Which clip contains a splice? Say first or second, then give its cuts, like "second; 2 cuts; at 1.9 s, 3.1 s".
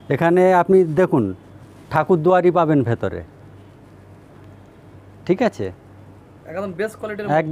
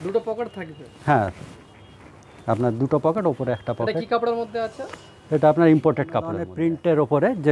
second; 1 cut; at 6.5 s